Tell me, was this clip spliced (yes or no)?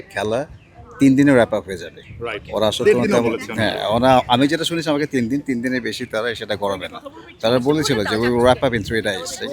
no